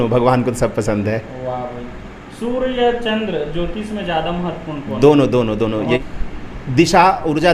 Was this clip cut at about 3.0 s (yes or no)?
no